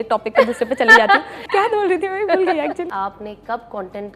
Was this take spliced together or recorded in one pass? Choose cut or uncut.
cut